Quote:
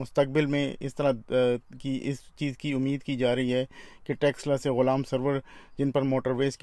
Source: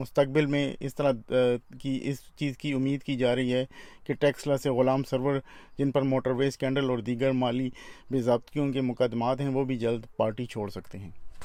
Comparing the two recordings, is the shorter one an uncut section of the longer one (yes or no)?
yes